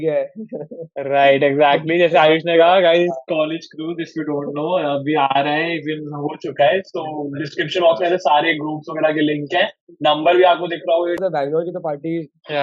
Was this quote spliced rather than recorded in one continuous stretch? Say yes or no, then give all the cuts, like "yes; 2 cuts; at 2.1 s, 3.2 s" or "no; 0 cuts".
yes; 1 cut; at 11.2 s